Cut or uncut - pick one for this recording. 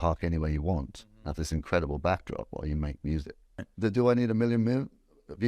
cut